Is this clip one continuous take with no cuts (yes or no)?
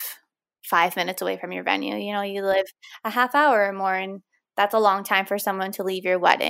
yes